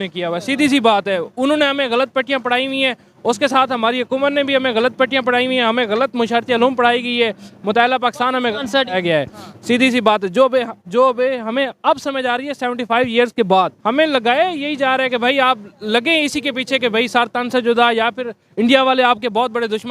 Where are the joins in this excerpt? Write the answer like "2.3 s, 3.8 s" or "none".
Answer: 13.8 s